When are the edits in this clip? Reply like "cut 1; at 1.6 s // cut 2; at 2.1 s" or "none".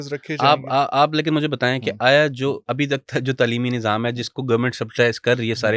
none

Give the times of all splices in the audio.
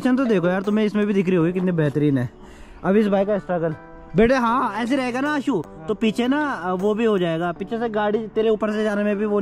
none

